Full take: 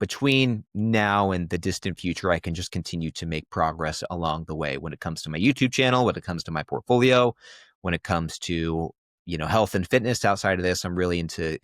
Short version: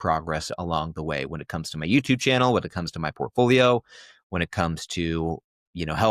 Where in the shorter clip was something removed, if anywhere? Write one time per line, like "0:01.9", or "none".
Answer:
none